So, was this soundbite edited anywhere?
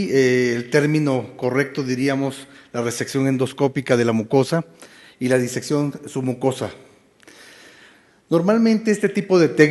no; 0 cuts

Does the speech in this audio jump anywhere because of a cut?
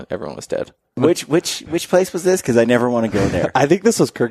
yes; 1 cut; at 1.0 s

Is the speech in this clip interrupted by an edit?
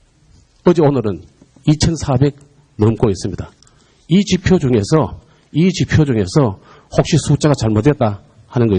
no; 0 cuts

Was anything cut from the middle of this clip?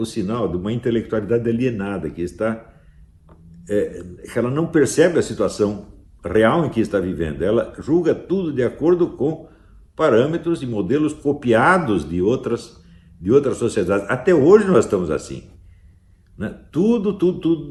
no; 0 cuts

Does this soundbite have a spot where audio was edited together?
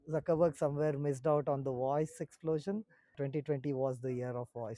yes; 1 cut; at 3.2 s

